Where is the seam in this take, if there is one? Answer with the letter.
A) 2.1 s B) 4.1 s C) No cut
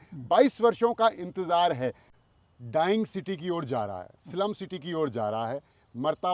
A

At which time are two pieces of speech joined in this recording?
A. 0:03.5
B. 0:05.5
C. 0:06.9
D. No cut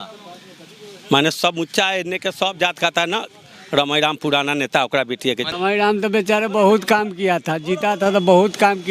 B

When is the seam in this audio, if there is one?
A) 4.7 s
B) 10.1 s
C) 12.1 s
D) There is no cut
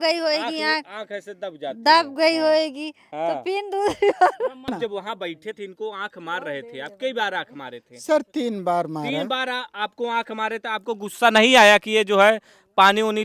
A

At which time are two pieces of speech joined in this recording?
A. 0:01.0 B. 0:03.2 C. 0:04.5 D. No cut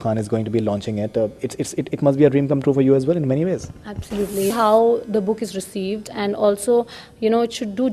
C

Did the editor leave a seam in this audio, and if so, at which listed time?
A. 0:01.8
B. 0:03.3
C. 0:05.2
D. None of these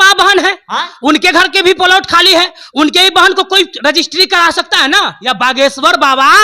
C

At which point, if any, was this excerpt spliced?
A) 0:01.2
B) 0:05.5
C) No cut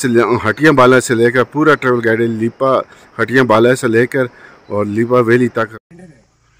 B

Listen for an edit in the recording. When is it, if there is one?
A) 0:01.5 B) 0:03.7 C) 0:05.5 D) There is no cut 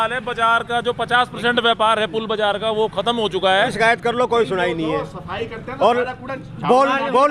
B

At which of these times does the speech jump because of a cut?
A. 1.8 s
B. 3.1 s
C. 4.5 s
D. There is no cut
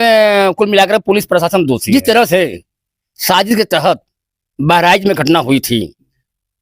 A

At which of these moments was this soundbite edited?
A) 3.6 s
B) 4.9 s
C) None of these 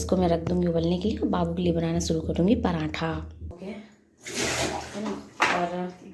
A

